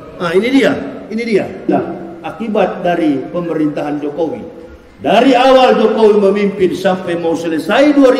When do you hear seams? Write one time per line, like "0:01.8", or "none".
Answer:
0:01.7